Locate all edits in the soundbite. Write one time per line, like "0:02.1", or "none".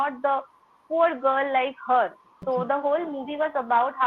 0:02.3